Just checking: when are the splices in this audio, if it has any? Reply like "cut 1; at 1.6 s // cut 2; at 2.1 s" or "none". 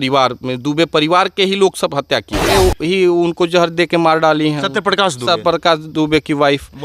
cut 1; at 2.5 s